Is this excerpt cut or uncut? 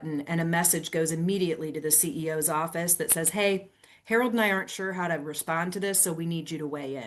uncut